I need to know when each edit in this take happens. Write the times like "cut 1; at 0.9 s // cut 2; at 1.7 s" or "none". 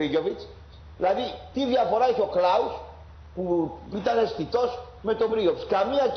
cut 1; at 1.7 s